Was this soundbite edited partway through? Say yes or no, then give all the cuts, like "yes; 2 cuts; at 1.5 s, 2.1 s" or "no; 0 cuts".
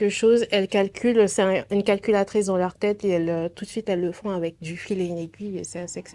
no; 0 cuts